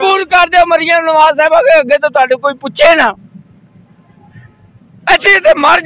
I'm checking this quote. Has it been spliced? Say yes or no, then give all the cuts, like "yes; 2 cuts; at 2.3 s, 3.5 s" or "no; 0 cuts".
no; 0 cuts